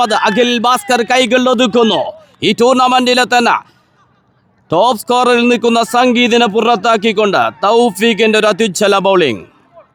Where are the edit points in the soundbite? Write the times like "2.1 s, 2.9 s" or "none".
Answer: none